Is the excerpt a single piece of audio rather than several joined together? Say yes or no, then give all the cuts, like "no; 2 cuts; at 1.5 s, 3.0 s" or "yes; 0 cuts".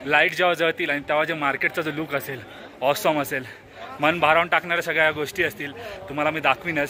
yes; 0 cuts